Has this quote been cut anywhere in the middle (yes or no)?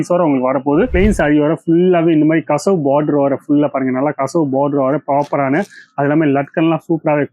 yes